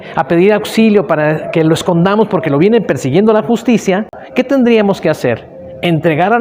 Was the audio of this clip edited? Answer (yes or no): yes